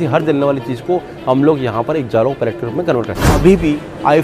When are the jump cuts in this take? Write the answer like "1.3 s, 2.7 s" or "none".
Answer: 3.3 s